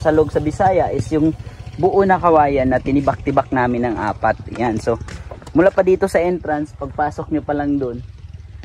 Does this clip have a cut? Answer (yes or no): no